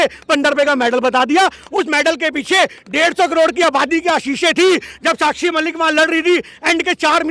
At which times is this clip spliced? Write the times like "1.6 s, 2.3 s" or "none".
none